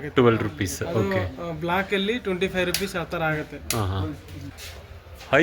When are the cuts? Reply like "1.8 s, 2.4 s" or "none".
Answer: 4.5 s